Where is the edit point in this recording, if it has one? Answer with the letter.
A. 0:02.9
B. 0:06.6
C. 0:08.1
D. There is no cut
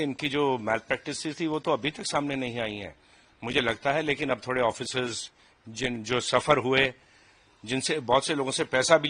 D